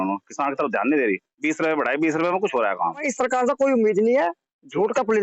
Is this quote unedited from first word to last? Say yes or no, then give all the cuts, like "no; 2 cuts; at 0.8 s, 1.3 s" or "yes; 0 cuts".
no; 1 cut; at 3.1 s